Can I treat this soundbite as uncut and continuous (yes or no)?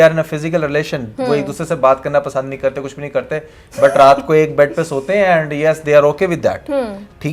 yes